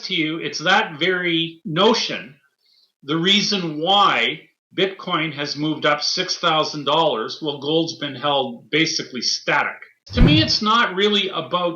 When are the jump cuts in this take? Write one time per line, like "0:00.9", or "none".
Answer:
0:01.6
0:10.0